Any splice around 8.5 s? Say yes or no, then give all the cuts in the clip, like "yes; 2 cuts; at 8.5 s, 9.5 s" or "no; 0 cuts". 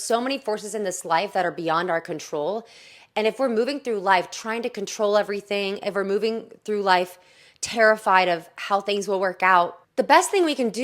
no; 1 cut; at 9.8 s